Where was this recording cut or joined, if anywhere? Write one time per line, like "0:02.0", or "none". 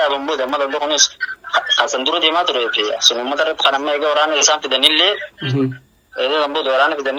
none